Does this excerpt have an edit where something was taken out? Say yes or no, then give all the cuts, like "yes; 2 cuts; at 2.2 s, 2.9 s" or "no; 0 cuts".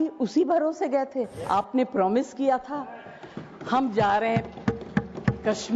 yes; 1 cut; at 1.4 s